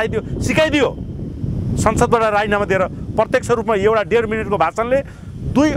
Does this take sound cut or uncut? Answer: uncut